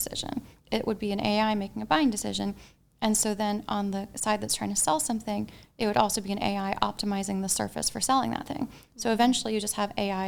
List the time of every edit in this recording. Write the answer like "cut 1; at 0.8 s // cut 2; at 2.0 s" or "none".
none